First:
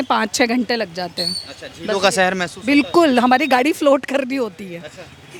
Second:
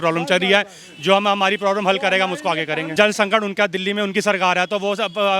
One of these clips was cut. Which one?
second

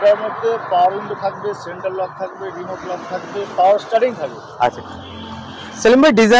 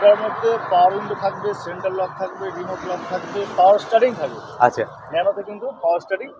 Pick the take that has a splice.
first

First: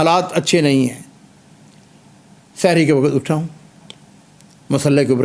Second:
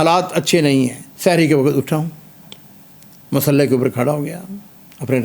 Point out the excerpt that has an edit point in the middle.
second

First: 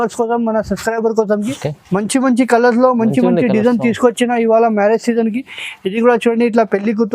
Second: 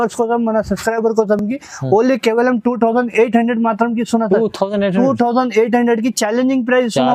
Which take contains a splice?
first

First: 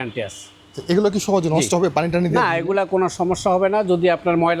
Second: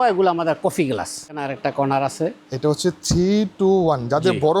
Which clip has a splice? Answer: second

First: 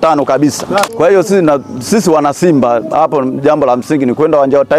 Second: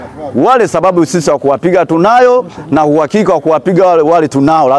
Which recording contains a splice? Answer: first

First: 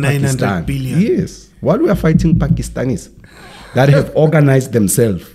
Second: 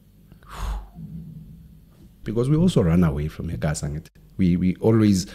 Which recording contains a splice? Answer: second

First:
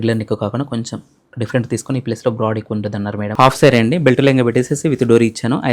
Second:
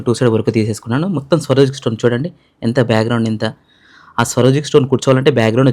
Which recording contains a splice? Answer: first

